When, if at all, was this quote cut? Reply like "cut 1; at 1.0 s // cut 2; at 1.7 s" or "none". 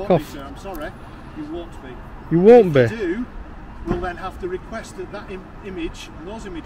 cut 1; at 2.2 s

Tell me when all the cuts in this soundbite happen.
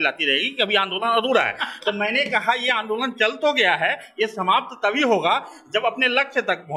none

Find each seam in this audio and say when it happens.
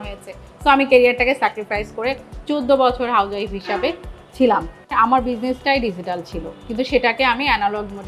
cut 1; at 4.7 s

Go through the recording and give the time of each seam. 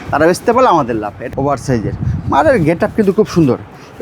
cut 1; at 1.2 s

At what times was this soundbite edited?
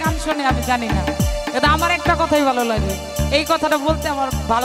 none

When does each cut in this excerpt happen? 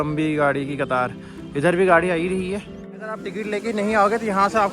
cut 1; at 3.0 s

